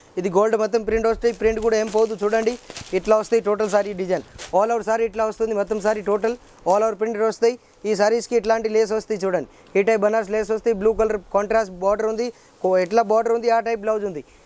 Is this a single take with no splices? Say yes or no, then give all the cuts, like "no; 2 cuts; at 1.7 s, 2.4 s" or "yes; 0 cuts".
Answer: yes; 0 cuts